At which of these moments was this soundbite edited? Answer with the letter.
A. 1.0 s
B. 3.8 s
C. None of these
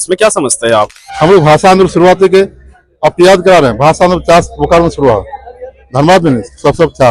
A